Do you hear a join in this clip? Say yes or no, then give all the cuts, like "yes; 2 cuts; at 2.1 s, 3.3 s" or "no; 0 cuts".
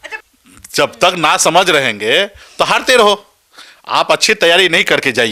no; 0 cuts